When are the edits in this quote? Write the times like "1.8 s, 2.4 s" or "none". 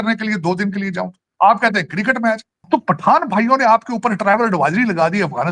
1.3 s, 2.7 s

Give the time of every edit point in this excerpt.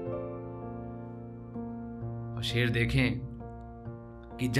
1.8 s

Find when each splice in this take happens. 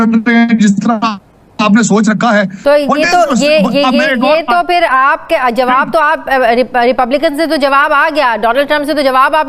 2.6 s

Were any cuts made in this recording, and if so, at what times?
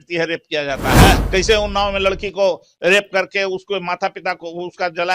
1.2 s

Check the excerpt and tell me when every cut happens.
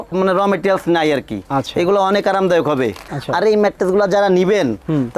none

